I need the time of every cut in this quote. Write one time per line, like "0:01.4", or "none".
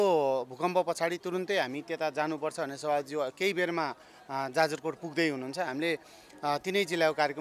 none